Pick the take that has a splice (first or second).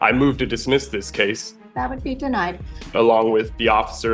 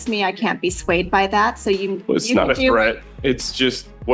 first